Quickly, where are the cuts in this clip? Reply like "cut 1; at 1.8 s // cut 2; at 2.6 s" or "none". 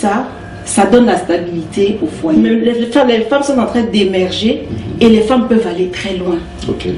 cut 1; at 2.7 s